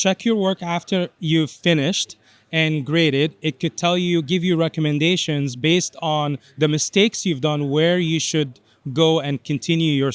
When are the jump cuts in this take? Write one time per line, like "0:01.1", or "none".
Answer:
none